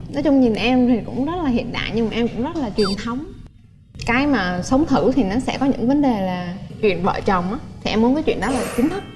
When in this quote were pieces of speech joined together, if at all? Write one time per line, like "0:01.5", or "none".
none